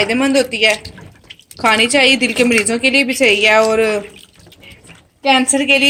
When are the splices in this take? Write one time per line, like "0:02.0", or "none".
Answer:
none